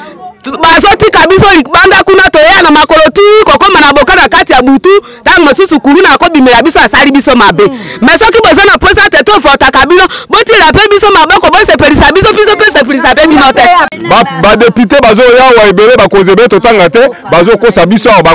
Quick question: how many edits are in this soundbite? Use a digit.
1